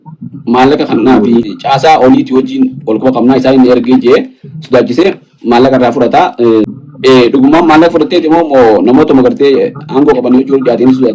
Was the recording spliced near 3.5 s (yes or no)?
no